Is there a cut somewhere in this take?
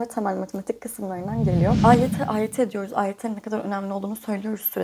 yes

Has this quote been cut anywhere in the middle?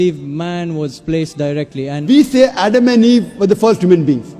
yes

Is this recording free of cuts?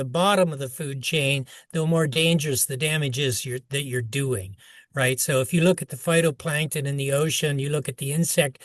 yes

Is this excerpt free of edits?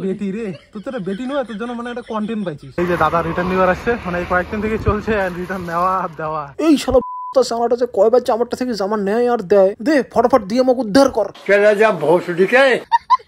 no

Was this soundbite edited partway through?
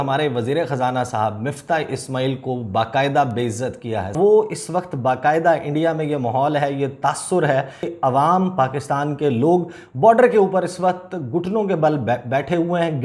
yes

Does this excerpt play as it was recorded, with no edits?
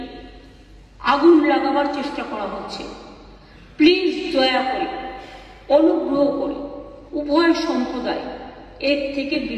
yes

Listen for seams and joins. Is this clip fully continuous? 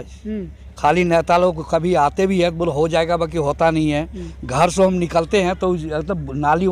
yes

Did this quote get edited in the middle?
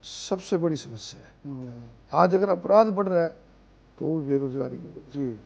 no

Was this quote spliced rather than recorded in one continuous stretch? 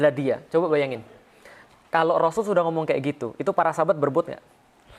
no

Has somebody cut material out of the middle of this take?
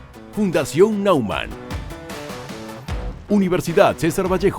yes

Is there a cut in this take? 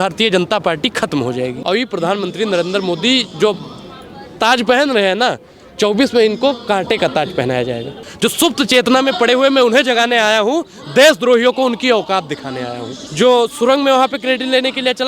yes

